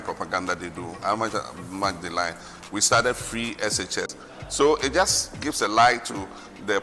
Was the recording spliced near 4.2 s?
yes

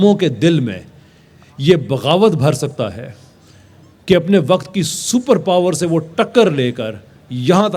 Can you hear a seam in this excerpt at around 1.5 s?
no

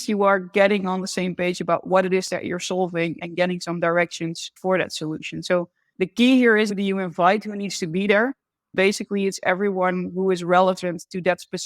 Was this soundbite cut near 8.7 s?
yes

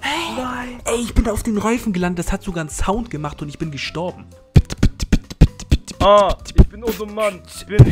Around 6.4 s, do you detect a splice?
no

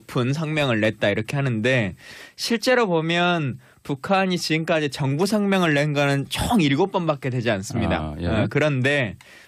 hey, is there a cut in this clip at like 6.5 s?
yes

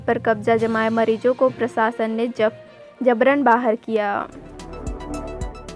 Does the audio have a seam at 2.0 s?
no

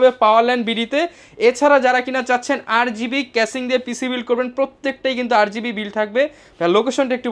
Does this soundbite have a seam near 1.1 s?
no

